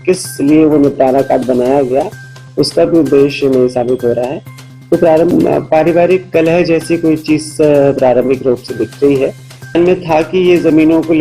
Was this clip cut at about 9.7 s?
yes; 2 cuts; at 5.3 s, 9.7 s

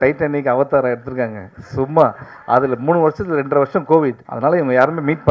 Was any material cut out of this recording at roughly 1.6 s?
no; 1 cut; at 4.3 s

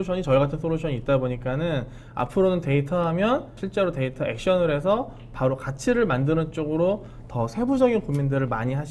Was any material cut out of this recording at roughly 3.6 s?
yes; 1 cut; at 3.6 s

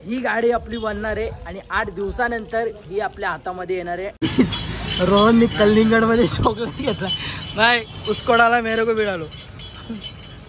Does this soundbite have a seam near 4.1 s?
yes; 1 cut; at 4.1 s

